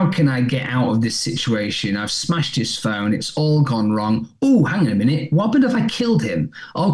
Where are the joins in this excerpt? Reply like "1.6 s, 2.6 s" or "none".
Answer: none